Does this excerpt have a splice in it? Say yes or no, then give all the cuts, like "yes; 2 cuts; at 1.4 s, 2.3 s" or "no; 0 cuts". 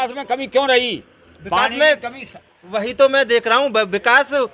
no; 0 cuts